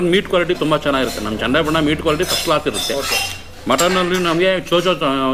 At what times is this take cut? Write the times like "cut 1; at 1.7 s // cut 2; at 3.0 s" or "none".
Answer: none

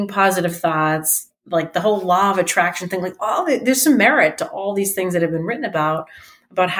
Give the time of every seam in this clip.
none

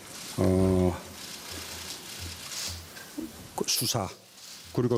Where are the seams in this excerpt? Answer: none

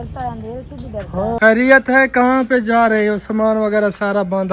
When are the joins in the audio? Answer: cut 1; at 1.4 s

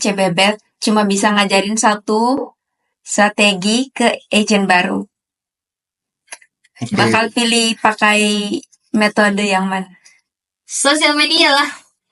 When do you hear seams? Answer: none

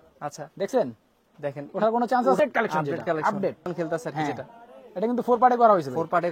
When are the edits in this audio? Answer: cut 1; at 2.4 s // cut 2; at 3.7 s

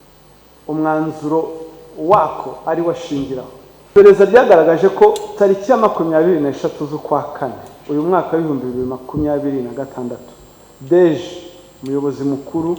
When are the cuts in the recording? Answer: cut 1; at 3.9 s

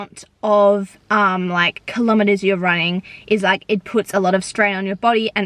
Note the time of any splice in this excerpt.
none

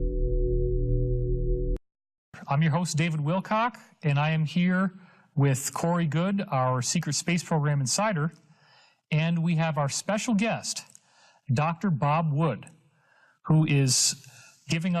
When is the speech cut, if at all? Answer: cut 1; at 1.7 s

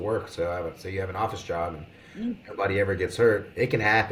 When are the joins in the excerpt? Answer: none

